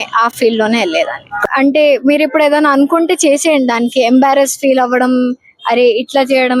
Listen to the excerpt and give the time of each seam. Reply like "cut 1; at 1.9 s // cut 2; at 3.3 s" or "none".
cut 1; at 1.4 s